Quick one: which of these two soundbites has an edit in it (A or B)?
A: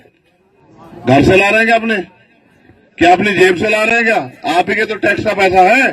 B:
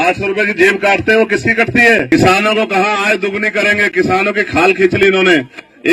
B